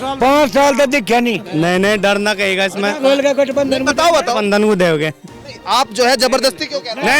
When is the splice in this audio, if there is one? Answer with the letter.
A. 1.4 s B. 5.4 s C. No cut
A